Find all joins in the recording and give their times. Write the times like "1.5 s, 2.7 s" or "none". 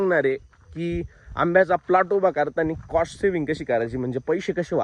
none